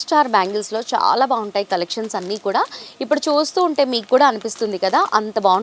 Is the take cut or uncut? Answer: uncut